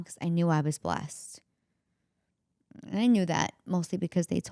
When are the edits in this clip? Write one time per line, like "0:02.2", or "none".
none